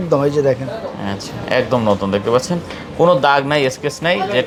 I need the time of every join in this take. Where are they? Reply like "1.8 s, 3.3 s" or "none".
none